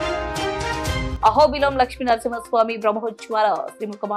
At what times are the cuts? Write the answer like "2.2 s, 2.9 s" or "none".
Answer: none

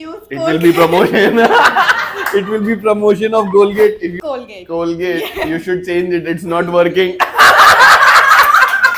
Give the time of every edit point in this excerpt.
4.1 s

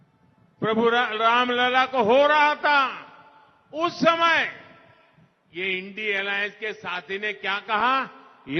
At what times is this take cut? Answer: none

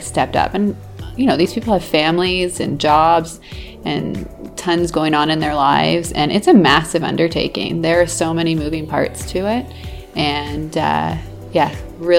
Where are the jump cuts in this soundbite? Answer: none

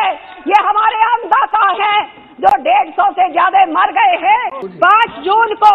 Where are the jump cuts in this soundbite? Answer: 4.6 s

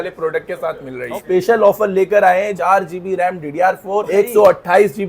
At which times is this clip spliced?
1.1 s, 2.5 s, 4.1 s

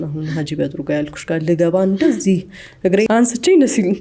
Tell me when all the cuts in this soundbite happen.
3.1 s

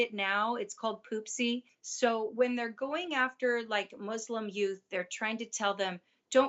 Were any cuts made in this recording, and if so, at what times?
1.8 s

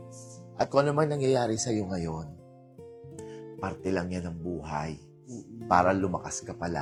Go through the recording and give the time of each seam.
none

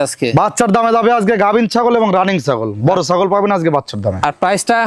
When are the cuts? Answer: none

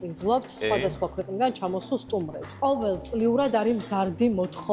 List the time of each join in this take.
none

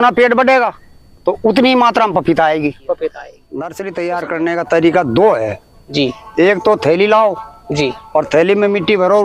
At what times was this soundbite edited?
2.9 s

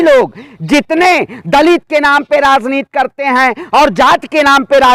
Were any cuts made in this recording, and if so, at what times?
none

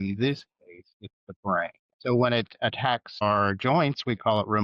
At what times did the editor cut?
1.9 s, 3.2 s

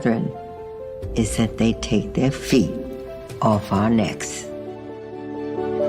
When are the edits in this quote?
4.2 s

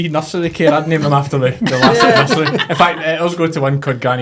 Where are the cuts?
none

